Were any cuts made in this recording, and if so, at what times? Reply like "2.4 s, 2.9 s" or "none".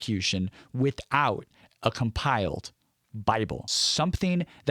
3.8 s